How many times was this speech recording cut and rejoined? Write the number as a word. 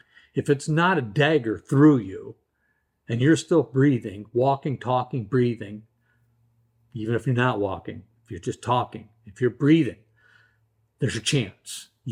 zero